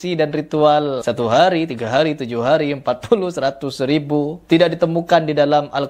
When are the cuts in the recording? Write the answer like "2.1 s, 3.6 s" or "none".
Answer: 1.0 s, 4.4 s